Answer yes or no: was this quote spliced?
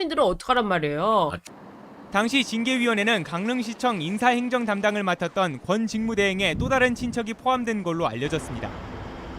yes